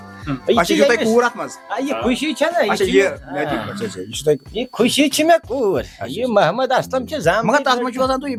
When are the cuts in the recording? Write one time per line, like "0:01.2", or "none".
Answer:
none